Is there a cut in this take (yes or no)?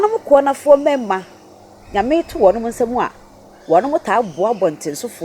no